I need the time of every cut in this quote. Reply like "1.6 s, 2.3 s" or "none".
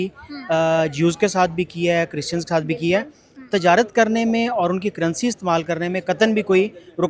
none